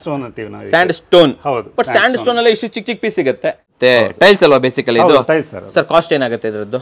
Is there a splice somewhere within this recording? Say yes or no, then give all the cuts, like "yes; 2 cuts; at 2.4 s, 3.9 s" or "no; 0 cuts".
yes; 1 cut; at 3.7 s